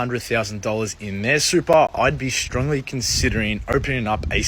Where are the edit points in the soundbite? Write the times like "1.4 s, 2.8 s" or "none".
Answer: none